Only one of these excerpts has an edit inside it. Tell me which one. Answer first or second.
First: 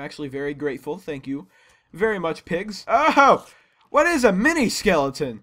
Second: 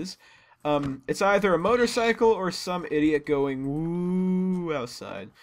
first